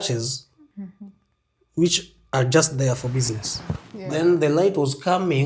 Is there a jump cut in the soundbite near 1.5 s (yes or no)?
no